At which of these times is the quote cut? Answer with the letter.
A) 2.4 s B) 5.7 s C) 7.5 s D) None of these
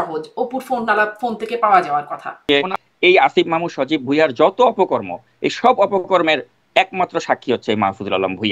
A